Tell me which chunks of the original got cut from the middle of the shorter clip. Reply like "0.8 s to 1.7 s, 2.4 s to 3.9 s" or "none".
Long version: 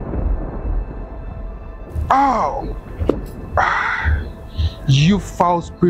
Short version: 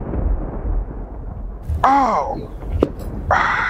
1.7 s to 1.9 s